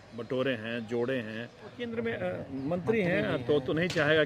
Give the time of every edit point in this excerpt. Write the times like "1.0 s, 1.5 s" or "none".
1.8 s